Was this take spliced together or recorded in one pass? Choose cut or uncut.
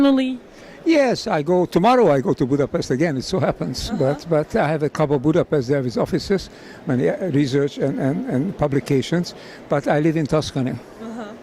cut